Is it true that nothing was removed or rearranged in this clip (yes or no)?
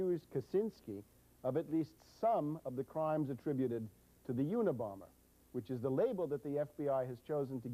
no